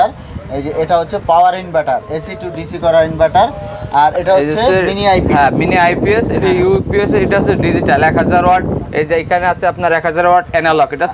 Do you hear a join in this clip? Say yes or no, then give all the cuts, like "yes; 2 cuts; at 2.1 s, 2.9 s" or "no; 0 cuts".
no; 0 cuts